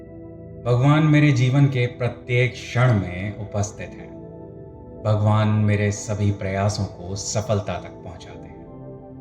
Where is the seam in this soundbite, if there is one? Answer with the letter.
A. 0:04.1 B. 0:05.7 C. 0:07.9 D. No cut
C